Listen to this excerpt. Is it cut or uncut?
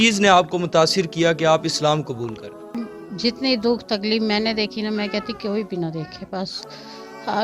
cut